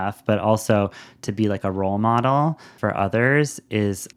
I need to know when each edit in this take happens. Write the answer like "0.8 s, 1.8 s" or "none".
2.7 s